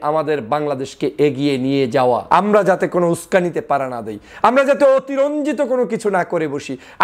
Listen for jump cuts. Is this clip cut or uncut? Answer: cut